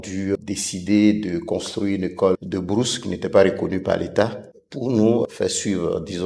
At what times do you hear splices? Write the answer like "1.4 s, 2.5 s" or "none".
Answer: none